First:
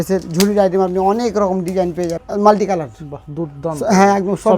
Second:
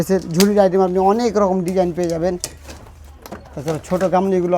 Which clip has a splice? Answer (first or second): first